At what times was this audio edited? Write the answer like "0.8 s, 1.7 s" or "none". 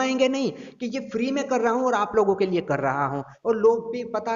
none